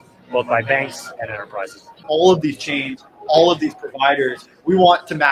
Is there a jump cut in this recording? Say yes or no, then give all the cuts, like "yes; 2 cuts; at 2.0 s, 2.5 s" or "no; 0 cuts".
yes; 1 cut; at 2.0 s